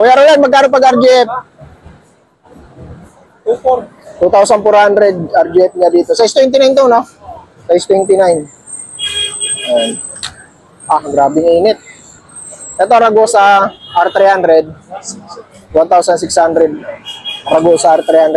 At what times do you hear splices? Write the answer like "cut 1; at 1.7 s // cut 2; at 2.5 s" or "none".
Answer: none

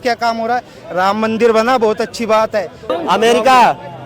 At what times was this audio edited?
cut 1; at 2.8 s

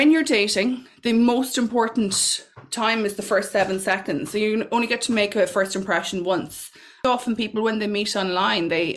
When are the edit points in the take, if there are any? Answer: cut 1; at 7.0 s

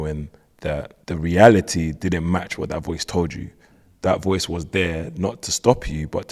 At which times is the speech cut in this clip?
cut 1; at 1.0 s

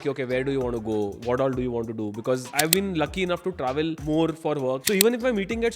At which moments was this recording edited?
cut 1; at 2.5 s // cut 2; at 4.0 s // cut 3; at 4.8 s

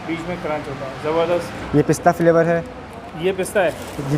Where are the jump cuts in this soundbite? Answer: cut 1; at 1.6 s

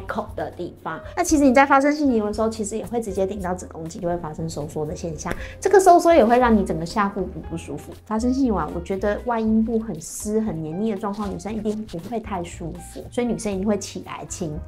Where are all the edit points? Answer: cut 1; at 1.0 s // cut 2; at 4.0 s // cut 3; at 7.9 s // cut 4; at 13.0 s

